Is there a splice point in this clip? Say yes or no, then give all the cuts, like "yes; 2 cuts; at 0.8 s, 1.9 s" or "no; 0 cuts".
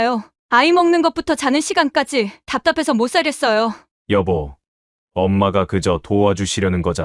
no; 0 cuts